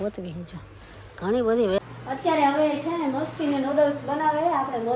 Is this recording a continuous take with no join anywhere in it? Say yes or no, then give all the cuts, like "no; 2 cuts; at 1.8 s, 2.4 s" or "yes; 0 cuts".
no; 1 cut; at 1.8 s